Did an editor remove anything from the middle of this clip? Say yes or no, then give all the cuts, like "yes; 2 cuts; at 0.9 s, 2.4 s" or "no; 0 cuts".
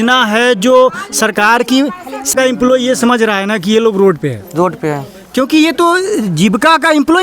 yes; 1 cut; at 2.3 s